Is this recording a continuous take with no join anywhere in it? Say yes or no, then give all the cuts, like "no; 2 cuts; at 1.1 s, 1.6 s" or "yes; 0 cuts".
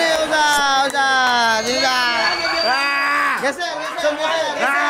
yes; 0 cuts